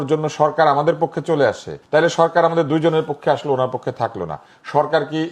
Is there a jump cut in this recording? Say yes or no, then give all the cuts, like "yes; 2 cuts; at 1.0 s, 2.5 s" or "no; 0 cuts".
yes; 1 cut; at 1.7 s